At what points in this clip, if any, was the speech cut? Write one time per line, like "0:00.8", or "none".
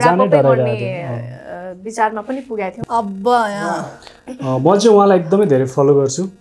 0:02.8